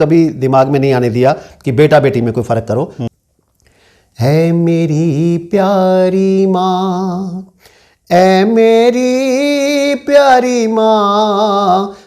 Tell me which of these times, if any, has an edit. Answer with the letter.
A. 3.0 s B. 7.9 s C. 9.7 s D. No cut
A